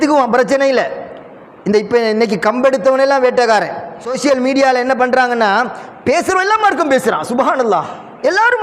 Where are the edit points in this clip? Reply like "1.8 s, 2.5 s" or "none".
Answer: 4.1 s